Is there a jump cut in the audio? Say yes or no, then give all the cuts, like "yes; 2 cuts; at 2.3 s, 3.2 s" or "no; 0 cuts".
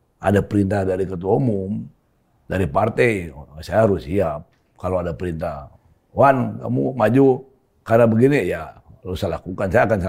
no; 0 cuts